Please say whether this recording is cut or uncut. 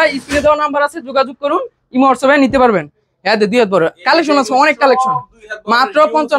uncut